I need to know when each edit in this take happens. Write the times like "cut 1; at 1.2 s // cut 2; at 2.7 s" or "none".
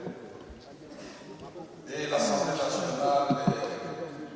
none